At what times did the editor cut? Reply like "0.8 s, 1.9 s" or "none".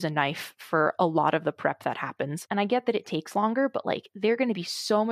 2.4 s